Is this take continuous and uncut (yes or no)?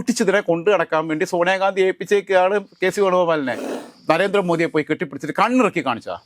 no